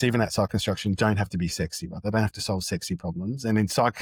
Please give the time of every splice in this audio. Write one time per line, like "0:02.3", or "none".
none